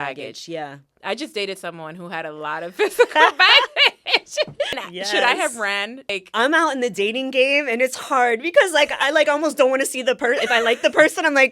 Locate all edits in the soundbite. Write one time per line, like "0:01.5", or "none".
0:04.8
0:06.2